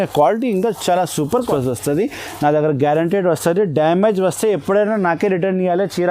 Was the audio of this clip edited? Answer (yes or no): yes